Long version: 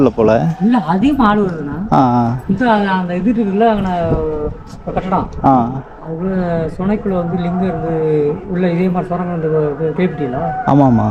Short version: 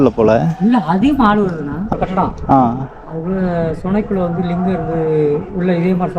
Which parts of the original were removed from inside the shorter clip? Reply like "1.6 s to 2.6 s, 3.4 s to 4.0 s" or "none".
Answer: 1.8 s to 4.7 s